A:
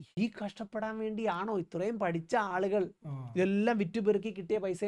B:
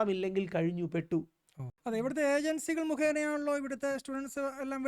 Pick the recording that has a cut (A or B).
B